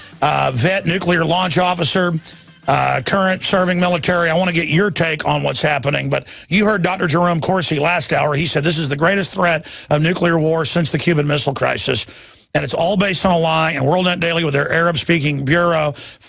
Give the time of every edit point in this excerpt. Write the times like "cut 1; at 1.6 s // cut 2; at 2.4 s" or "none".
cut 1; at 10.2 s